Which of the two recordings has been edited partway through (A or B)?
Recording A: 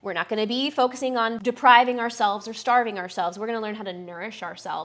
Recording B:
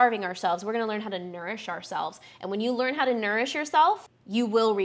A